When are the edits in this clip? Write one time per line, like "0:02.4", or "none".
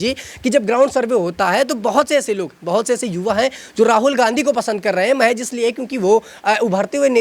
none